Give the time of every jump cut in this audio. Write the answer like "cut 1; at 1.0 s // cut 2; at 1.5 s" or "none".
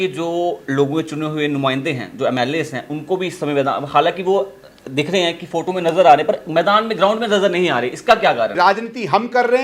cut 1; at 8.5 s